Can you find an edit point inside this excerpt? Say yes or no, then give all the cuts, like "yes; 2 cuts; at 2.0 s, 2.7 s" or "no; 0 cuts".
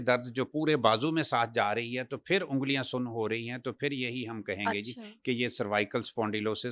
no; 0 cuts